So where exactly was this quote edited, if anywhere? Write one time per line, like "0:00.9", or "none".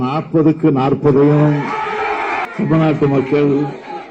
0:02.4